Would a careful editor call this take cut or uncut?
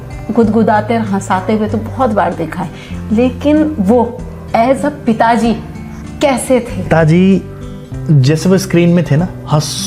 cut